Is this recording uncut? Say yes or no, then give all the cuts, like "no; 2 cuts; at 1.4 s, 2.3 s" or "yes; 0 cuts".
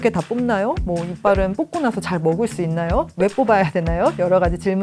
yes; 0 cuts